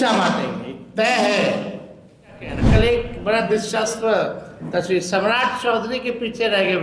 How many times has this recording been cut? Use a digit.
1